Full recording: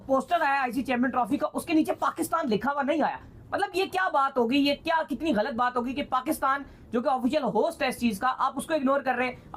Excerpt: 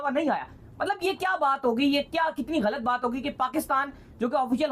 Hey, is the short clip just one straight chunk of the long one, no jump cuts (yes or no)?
yes